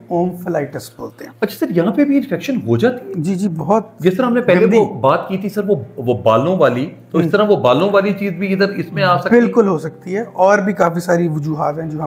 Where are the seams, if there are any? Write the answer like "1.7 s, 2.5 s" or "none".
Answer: none